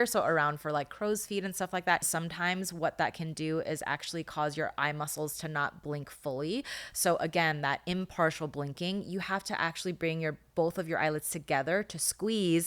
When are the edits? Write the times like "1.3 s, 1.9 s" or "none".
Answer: 2.1 s